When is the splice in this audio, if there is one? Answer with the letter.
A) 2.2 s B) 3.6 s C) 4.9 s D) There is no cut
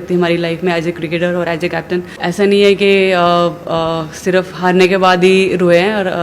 A